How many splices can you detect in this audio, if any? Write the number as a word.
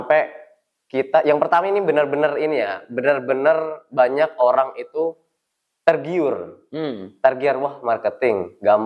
zero